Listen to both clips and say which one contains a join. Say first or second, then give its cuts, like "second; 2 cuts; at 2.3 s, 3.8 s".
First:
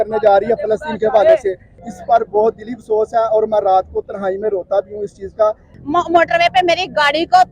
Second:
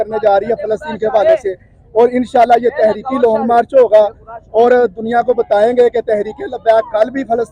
first; 2 cuts; at 1.8 s, 5.7 s